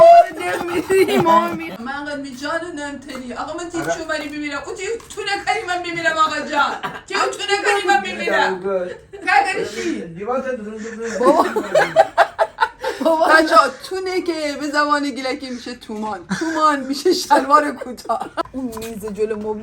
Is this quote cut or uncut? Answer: cut